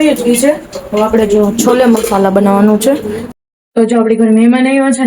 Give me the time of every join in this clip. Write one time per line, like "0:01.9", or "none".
0:03.3